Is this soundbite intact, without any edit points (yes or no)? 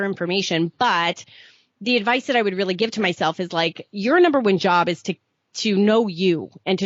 yes